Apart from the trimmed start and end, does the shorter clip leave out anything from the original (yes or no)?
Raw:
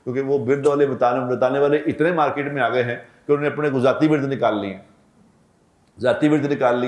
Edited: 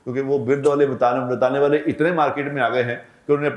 no